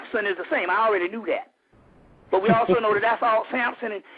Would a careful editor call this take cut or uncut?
uncut